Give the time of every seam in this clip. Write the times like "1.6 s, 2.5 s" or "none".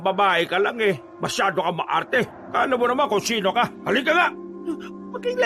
1.1 s, 2.4 s, 3.8 s, 4.5 s